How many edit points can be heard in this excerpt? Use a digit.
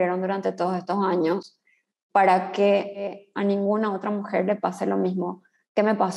1